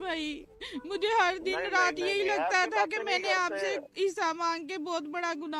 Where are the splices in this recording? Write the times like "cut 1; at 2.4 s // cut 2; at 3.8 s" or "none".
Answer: none